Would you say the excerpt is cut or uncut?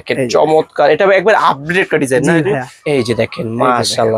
cut